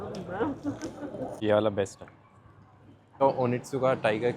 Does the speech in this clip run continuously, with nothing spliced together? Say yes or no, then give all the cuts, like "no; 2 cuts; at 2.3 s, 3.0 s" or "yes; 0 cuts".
no; 2 cuts; at 1.4 s, 3.2 s